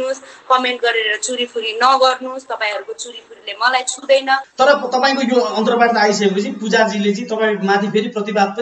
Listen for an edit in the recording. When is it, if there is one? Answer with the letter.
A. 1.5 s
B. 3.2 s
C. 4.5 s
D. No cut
C